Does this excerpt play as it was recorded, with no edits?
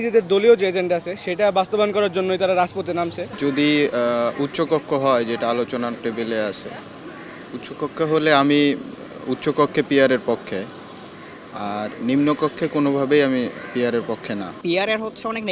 no; 2 cuts; at 3.2 s, 14.6 s

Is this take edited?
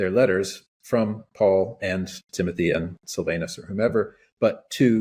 no; 0 cuts

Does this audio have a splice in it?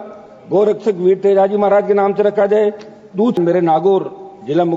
yes; 1 cut; at 3.4 s

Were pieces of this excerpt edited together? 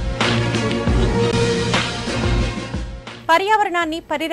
no; 0 cuts

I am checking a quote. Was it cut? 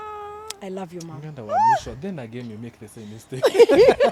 no; 0 cuts

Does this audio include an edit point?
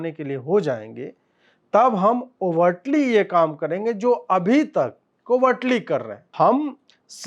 yes; 1 cut; at 6.3 s

